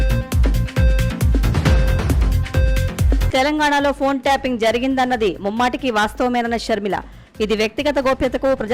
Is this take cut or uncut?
uncut